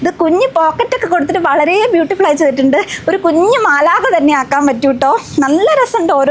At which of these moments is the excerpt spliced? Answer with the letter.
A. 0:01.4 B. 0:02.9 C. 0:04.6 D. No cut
D